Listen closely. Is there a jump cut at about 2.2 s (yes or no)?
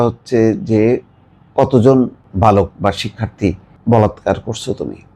yes